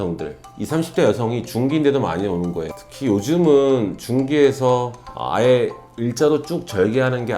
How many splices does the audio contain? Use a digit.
1